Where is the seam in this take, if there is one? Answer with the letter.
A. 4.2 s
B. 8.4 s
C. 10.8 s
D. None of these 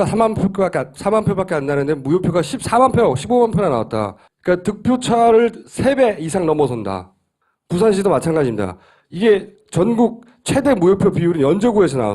C